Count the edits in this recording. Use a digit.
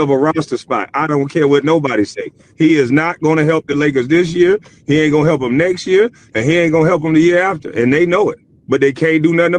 1